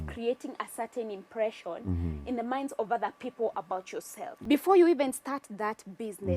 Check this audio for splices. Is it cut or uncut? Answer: cut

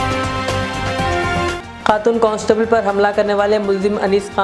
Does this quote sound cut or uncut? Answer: cut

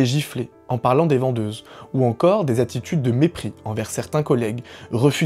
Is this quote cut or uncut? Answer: uncut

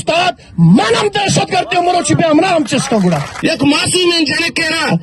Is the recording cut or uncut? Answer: cut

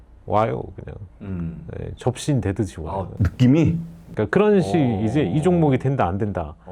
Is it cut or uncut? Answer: uncut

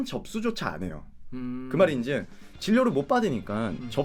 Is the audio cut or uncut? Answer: uncut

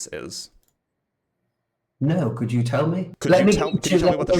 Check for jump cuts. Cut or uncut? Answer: cut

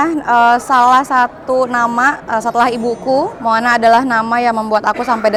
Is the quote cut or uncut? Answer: uncut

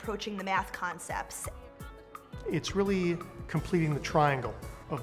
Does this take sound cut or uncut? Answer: cut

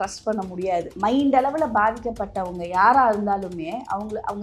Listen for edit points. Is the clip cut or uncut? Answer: cut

